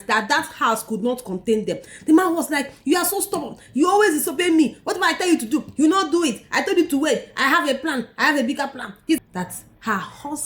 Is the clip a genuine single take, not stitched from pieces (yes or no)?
no